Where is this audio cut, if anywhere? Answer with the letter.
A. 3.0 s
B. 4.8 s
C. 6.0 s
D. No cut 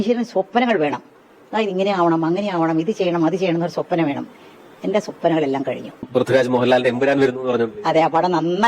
C